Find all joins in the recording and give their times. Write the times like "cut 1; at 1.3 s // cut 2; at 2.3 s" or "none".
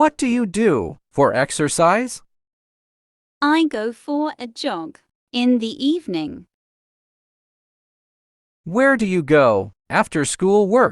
cut 1; at 1.0 s

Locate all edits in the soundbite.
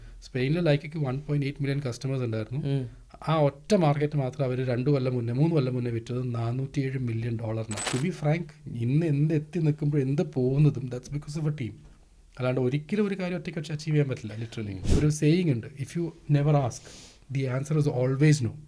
cut 1; at 7.9 s // cut 2; at 14.8 s

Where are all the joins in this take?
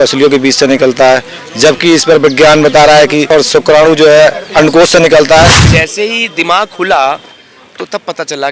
cut 1; at 3.3 s // cut 2; at 5.6 s

